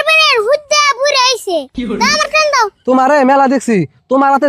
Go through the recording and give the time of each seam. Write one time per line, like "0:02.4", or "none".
0:02.8